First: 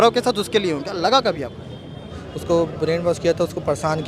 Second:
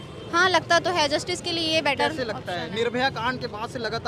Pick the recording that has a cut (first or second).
first